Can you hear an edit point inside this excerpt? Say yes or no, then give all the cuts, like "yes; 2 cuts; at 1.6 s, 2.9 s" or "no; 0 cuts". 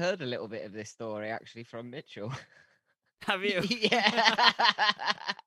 no; 0 cuts